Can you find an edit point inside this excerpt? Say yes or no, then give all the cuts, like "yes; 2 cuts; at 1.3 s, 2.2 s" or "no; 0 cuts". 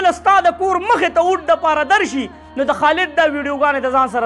no; 0 cuts